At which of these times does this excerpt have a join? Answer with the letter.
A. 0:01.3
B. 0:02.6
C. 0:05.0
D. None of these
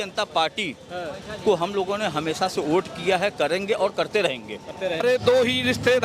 C